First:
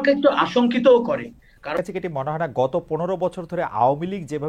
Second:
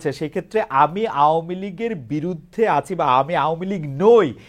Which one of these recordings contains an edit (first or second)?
first